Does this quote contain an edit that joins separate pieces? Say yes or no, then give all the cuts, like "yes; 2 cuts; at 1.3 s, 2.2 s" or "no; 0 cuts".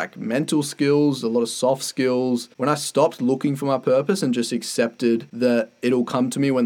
yes; 2 cuts; at 2.5 s, 5.3 s